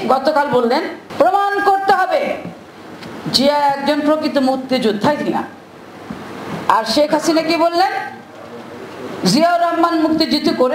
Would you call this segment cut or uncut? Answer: cut